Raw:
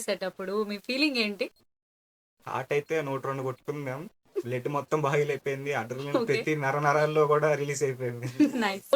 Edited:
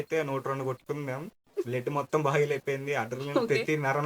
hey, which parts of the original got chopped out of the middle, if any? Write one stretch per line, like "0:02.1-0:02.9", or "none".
none